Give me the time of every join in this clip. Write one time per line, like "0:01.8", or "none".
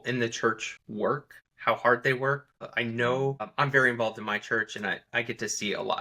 0:01.1
0:02.5
0:03.5
0:05.0